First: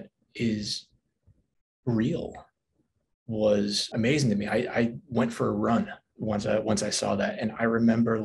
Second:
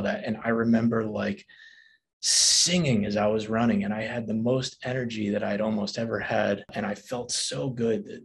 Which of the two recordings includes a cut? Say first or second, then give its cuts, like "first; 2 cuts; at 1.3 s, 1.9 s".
second; 1 cut; at 6.7 s